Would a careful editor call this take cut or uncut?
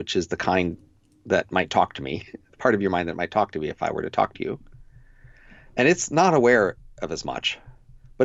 uncut